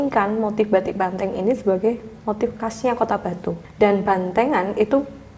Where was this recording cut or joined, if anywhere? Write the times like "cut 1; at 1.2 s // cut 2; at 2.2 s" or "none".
cut 1; at 3.6 s